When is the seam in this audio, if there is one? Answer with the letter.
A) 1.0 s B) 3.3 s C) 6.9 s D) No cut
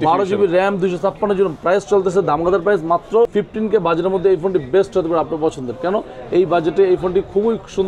B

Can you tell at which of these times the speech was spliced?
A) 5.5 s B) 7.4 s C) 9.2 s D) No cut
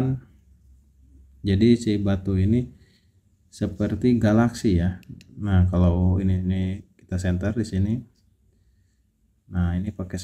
D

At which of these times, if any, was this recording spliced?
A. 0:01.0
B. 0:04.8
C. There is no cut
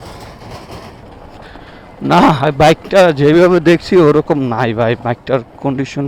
A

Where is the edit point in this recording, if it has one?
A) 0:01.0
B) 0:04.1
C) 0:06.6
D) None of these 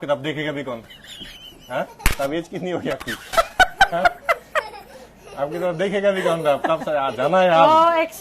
A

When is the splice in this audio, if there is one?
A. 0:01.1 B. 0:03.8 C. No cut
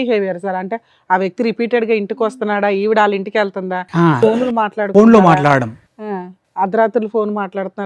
C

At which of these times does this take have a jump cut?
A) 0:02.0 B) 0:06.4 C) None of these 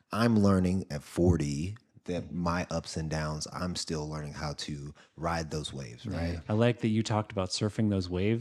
B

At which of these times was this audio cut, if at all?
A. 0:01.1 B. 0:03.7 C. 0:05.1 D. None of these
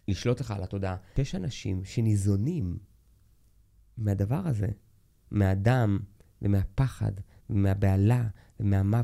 A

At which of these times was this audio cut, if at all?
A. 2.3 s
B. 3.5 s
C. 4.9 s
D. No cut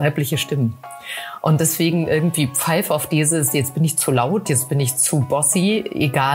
D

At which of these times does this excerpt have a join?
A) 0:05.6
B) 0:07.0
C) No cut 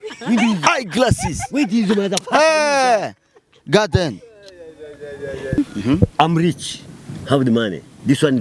A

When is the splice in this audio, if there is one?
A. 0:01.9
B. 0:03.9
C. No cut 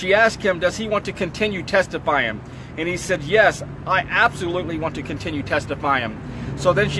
C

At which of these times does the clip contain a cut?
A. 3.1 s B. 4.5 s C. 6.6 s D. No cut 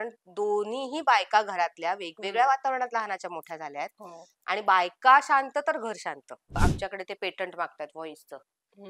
C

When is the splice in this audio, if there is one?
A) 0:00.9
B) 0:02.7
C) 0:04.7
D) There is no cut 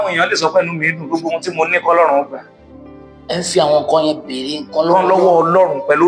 D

